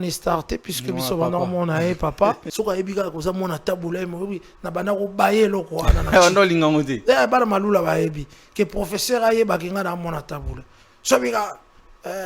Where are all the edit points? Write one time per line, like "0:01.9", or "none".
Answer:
0:02.5